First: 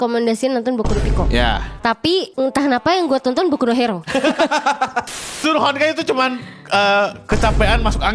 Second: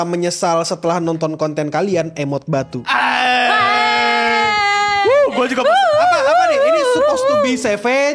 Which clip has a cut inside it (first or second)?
first